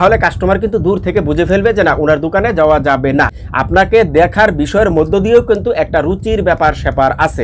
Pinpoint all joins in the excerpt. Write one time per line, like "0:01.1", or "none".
0:03.3